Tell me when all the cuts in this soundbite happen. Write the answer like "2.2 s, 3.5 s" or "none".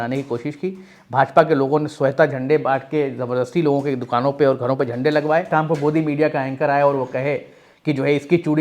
5.5 s